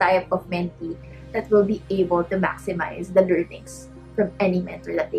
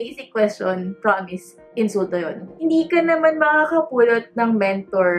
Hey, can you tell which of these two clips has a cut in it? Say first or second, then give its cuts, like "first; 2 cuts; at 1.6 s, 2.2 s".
second; 1 cut; at 2.5 s